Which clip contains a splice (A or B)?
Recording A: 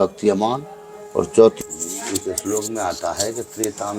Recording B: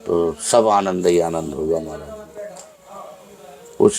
A